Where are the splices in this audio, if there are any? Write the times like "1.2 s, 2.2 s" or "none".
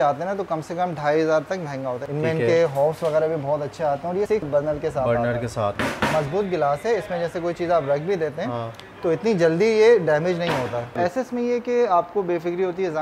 2.0 s, 4.4 s, 5.8 s, 10.9 s